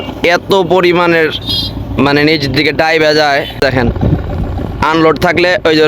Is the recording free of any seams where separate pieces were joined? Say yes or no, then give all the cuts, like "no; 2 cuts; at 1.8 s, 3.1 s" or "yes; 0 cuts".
no; 1 cut; at 3.6 s